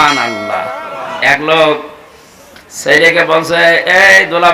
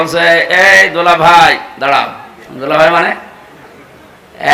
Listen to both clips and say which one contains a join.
first; 1 cut; at 1.2 s

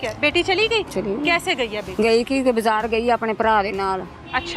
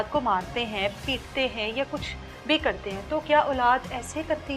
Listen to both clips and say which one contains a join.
first; 2 cuts; at 0.9 s, 1.9 s

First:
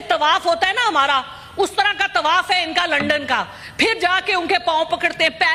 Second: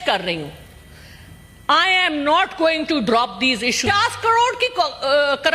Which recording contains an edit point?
second; 1 cut; at 3.8 s

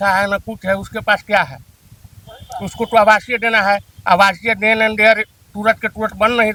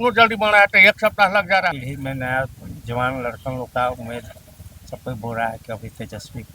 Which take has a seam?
second; 1 cut; at 1.7 s

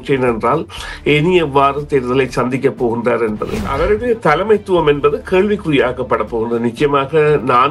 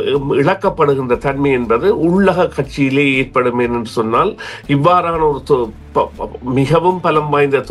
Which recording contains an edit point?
first; 1 cut; at 3.7 s

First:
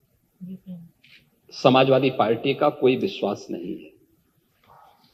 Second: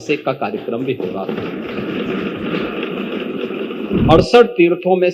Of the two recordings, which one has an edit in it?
second; 1 cut; at 4.0 s

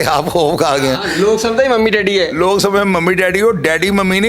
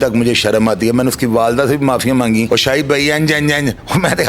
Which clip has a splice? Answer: second; 1 cut; at 2.5 s

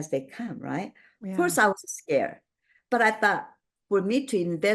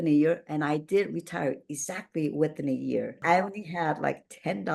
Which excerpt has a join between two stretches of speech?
second; 1 cut; at 3.2 s

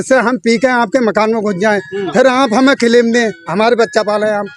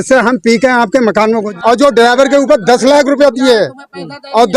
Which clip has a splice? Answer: second; 1 cut; at 1.5 s

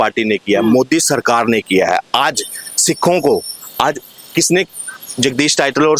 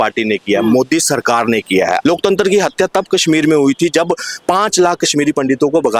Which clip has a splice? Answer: second; 1 cut; at 2.0 s

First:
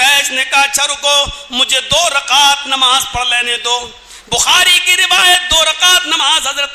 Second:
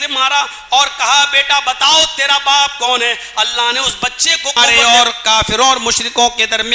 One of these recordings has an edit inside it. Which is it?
second; 1 cut; at 4.6 s

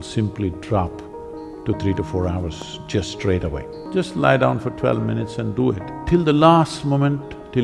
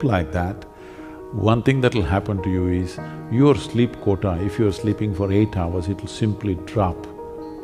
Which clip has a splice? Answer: first; 2 cuts; at 3.7 s, 5.9 s

